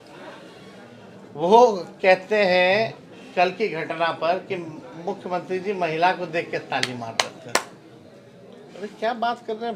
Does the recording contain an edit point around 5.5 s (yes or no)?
no